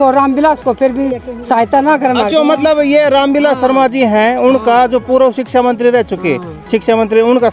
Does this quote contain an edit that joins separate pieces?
no; 0 cuts

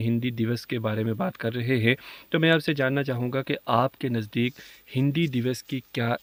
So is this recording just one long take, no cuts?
yes; 0 cuts

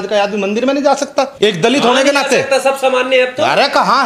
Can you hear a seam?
yes; 1 cut; at 1.3 s

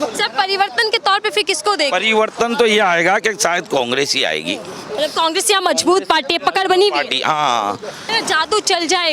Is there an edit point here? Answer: yes; 1 cut; at 8.1 s

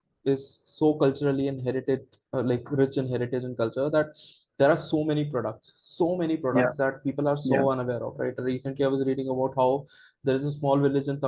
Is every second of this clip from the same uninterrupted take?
yes; 0 cuts

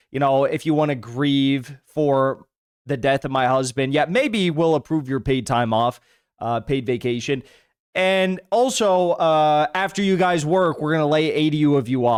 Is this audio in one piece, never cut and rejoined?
yes; 0 cuts

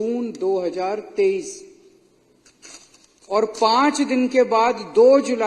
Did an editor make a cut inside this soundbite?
no; 0 cuts

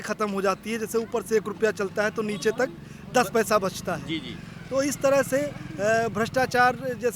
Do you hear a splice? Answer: no; 0 cuts

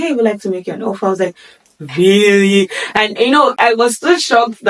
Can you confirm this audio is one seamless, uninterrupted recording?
no; 1 cut; at 3.6 s

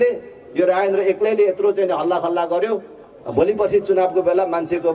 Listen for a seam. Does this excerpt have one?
no; 0 cuts

